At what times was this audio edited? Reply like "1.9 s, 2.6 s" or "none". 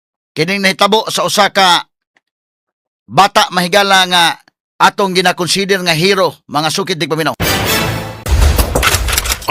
8.3 s

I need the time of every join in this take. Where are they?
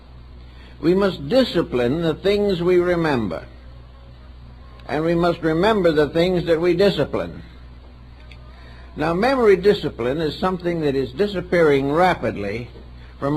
2.6 s

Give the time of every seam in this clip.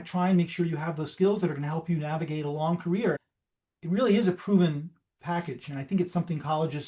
3.2 s

